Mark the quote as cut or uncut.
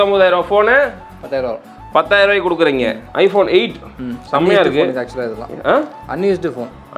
uncut